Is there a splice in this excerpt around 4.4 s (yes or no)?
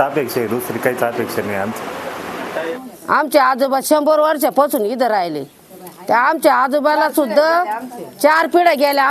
no